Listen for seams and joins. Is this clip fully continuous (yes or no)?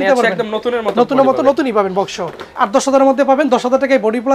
no